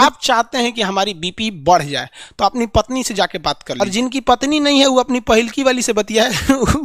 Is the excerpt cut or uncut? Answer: cut